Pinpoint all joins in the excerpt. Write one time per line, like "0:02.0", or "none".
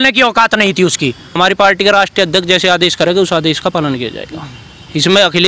0:01.4